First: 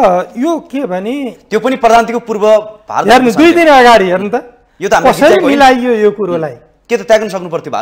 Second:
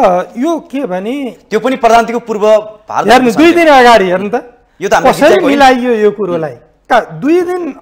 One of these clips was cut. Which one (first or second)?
second